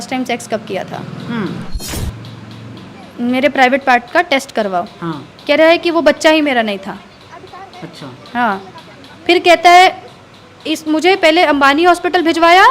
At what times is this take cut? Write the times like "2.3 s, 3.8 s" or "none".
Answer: 1.8 s

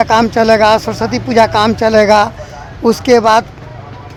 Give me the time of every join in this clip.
none

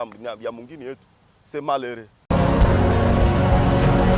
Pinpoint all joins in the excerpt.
2.1 s

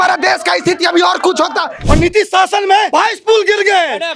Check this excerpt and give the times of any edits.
1.8 s, 2.9 s

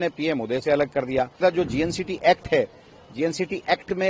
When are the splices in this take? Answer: 1.4 s

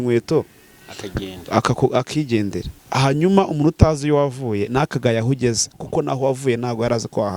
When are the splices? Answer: 2.8 s

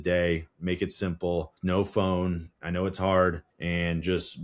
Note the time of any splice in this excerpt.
1.5 s, 3.5 s

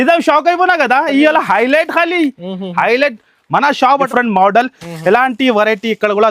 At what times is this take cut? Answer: 4.1 s

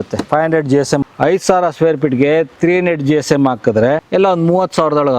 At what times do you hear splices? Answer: 1.0 s, 4.0 s

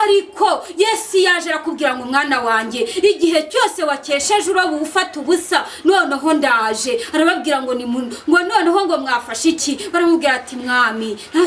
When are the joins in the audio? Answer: none

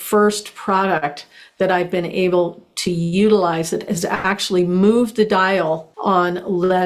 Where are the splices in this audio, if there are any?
5.9 s

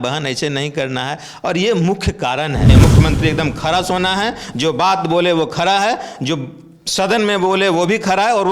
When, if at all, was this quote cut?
2.7 s

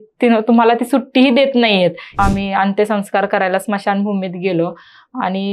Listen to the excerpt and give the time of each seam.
2.2 s

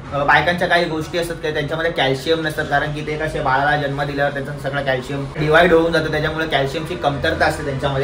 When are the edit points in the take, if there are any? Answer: 5.3 s

